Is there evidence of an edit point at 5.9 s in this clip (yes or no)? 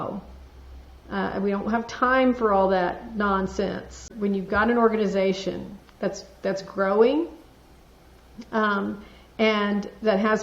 no